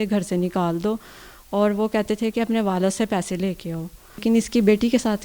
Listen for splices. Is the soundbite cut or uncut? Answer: cut